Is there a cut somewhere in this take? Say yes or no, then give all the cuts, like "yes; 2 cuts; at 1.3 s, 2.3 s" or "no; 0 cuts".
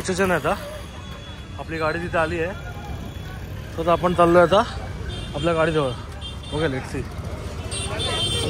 no; 0 cuts